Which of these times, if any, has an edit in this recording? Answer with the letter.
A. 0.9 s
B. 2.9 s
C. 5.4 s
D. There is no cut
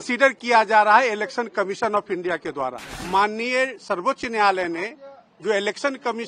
B